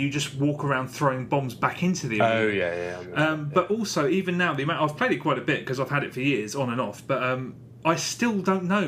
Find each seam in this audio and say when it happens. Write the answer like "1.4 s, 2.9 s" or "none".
none